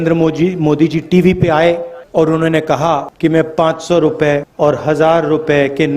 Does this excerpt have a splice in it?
yes; 3 cuts; at 1.9 s, 3.1 s, 4.5 s

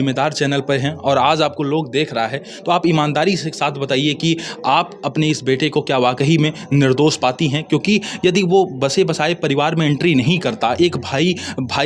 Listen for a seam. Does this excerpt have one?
no; 0 cuts

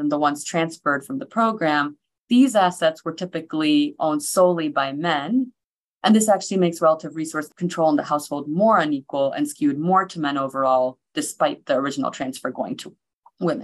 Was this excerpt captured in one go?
no; 2 cuts; at 5.6 s, 7.5 s

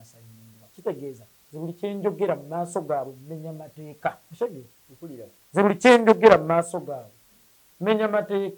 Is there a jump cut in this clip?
yes; 1 cut; at 4.2 s

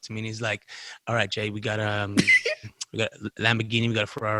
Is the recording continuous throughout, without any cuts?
yes; 0 cuts

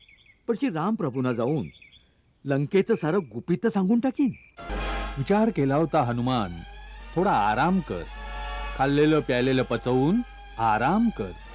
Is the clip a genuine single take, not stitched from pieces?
no; 1 cut; at 4.6 s

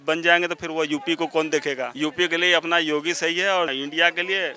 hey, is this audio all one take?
no; 2 cuts; at 1.9 s, 3.7 s

